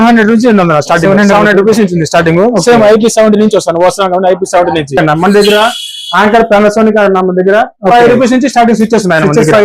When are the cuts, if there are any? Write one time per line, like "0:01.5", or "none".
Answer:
0:05.0